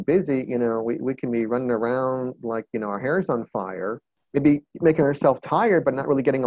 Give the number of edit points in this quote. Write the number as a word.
one